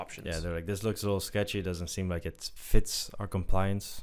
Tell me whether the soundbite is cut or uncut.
uncut